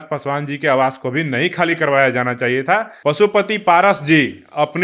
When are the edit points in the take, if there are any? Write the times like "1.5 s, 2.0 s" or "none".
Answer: 2.9 s